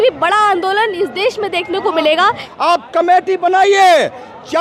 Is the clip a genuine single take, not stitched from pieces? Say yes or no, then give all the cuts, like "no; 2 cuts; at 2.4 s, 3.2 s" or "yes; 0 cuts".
no; 1 cut; at 2.4 s